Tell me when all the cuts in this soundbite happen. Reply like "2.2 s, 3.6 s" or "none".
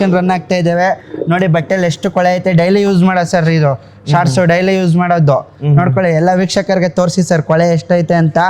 none